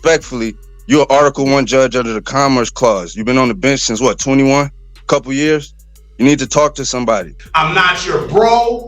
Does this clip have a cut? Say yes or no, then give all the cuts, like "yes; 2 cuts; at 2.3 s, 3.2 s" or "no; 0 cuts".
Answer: yes; 1 cut; at 7.4 s